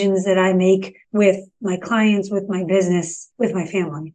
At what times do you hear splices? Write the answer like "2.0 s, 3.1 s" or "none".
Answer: 1.0 s, 3.2 s